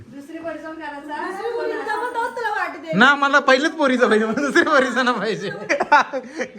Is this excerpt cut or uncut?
cut